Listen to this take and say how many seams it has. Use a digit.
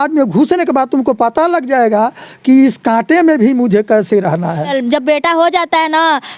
1